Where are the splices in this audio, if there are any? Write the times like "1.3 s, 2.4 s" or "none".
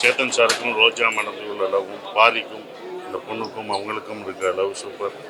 none